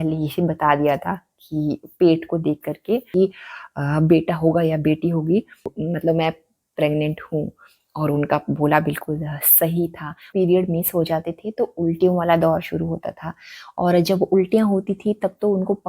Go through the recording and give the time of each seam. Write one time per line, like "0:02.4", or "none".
0:03.1
0:05.7
0:10.2